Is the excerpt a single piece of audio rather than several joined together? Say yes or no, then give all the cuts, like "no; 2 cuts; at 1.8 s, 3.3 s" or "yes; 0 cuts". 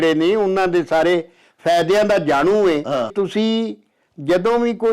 no; 1 cut; at 3.1 s